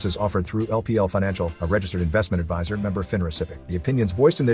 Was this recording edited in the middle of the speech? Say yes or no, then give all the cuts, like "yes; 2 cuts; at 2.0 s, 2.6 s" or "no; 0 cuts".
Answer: yes; 1 cut; at 3.6 s